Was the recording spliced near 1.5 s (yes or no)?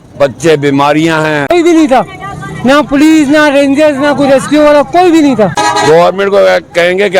yes